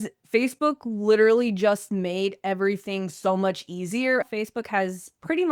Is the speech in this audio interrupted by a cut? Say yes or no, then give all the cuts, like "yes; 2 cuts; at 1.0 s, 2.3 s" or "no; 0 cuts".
yes; 1 cut; at 4.2 s